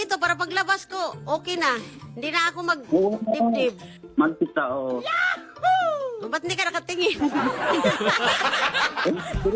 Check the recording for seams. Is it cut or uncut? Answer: uncut